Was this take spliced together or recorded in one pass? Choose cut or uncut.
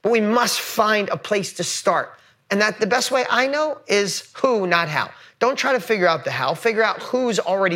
uncut